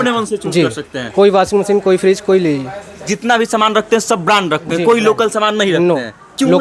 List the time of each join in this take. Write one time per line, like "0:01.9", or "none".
0:03.1